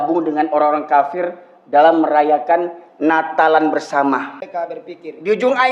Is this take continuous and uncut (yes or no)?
no